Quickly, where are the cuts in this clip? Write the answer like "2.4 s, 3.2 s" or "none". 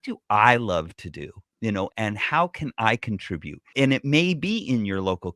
1.9 s, 3.7 s